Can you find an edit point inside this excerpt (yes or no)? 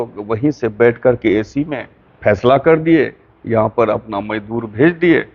no